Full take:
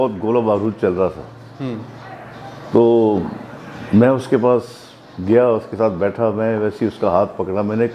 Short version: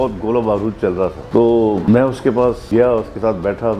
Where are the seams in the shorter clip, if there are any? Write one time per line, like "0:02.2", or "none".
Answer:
0:01.2
0:01.8
0:02.6